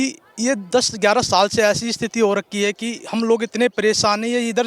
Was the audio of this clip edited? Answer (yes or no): no